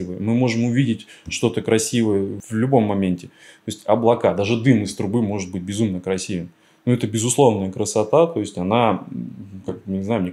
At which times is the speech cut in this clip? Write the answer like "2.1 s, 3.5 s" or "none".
2.4 s